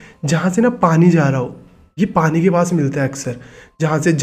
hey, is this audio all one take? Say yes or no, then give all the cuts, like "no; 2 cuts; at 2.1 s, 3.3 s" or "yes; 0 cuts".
yes; 0 cuts